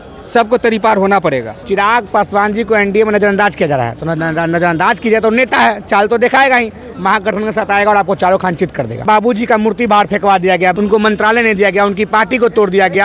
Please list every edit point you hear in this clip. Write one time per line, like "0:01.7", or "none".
0:01.5
0:09.0
0:10.7

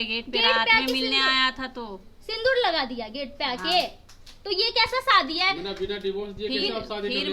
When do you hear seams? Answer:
none

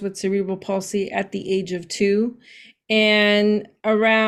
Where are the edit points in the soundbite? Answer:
none

